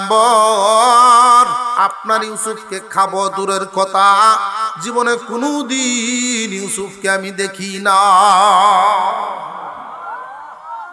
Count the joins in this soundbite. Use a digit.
1